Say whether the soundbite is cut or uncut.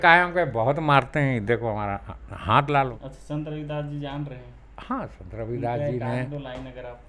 cut